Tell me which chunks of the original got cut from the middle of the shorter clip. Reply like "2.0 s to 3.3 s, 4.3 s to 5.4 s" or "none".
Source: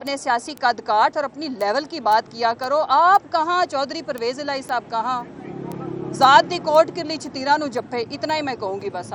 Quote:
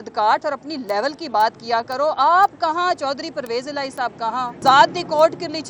5.3 s to 6.1 s